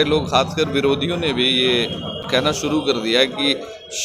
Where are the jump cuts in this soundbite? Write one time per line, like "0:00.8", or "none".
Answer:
0:02.2